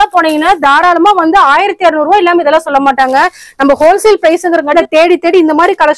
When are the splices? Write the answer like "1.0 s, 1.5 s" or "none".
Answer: 4.7 s

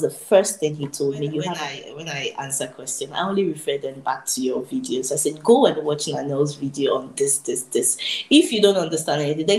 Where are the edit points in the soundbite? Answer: 1.5 s

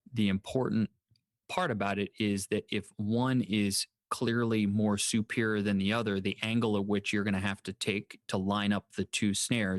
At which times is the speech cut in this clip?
1.4 s

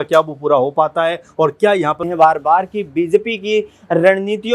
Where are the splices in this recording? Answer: 2.0 s

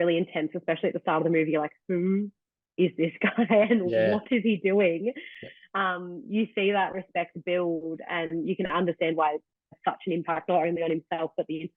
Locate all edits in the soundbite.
9.8 s

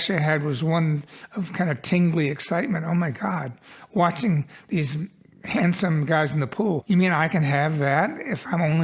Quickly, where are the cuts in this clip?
6.8 s

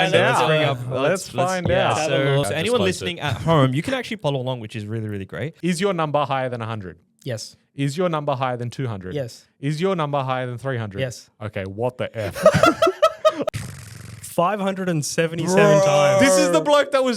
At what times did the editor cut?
2.5 s, 4.2 s, 5.5 s, 13.5 s

